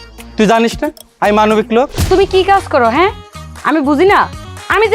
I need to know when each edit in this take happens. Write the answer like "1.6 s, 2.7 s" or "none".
2.0 s